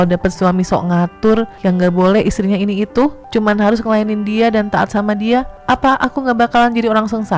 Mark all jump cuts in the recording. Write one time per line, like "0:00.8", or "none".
0:01.5
0:03.2
0:05.5